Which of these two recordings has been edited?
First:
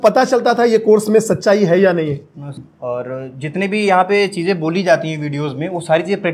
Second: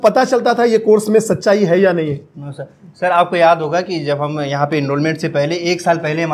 first; 1 cut; at 2.7 s

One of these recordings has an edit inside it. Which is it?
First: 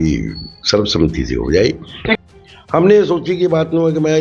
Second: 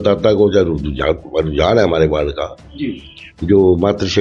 first; 1 cut; at 2.2 s

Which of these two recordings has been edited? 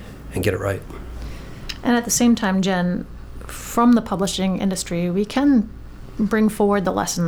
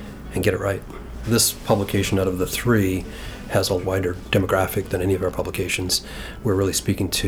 second; 2 cuts; at 1.2 s, 3.9 s

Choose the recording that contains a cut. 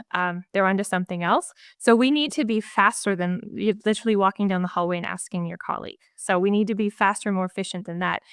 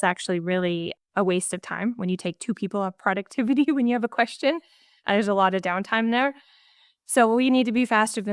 second; 1 cut; at 1.0 s

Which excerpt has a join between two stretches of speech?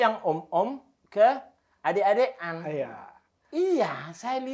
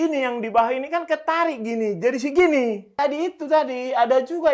second; 1 cut; at 2.9 s

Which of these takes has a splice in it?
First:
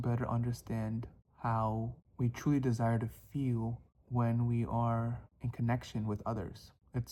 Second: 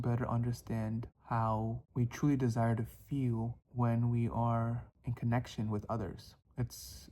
second; 3 cuts; at 1.1 s, 1.8 s, 3.6 s

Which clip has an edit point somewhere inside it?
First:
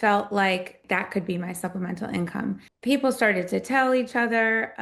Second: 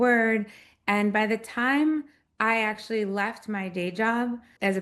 first; 2 cuts; at 0.8 s, 2.7 s

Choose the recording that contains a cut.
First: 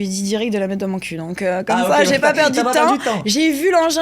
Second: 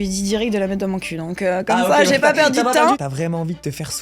second; 1 cut; at 3.0 s

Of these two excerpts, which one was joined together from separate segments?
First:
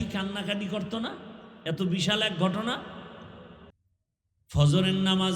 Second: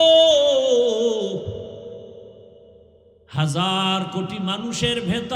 first; 1 cut; at 3.7 s

